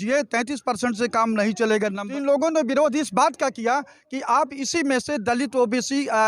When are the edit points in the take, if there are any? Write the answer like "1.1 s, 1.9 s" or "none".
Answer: 2.0 s